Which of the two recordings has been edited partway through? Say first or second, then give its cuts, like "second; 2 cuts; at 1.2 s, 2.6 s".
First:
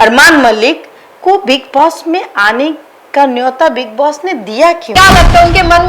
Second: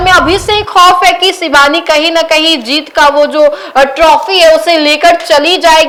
first; 1 cut; at 4.8 s